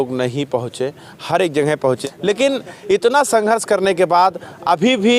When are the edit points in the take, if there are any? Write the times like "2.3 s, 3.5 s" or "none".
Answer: 2.0 s